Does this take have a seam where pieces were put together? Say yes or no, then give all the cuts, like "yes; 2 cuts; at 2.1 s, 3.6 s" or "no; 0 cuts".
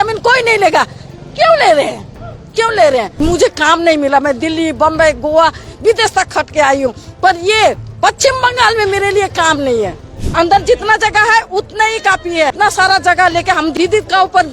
yes; 4 cuts; at 3.1 s, 10.2 s, 12.5 s, 13.7 s